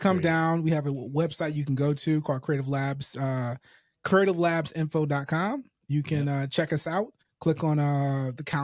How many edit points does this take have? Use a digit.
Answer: 1